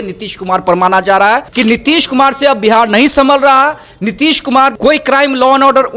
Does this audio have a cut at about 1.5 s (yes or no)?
yes